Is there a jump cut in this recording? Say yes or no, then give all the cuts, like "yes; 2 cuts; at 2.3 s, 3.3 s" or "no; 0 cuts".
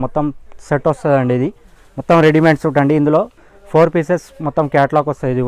no; 0 cuts